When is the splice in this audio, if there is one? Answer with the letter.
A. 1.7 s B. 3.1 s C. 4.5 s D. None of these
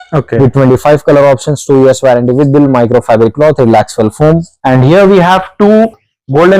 C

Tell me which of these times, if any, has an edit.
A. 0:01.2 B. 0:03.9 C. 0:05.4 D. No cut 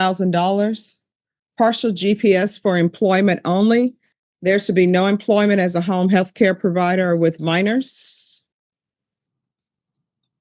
D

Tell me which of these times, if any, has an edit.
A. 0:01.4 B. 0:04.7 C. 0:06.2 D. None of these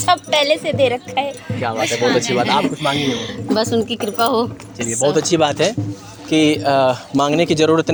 D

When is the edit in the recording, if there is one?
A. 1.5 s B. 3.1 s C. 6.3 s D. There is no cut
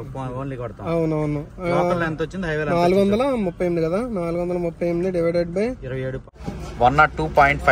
C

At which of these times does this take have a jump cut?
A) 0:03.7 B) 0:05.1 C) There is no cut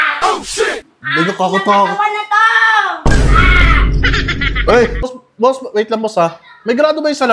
B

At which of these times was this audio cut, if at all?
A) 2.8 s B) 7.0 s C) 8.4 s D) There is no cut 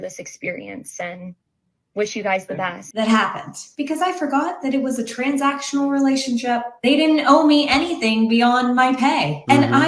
A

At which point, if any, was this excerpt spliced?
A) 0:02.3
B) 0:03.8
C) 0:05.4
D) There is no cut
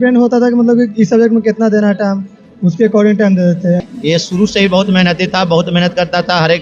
B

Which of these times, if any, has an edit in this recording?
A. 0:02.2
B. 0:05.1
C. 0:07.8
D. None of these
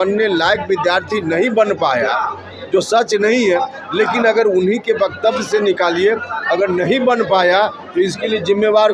D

